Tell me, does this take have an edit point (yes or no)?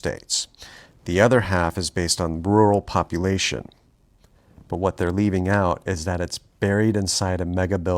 yes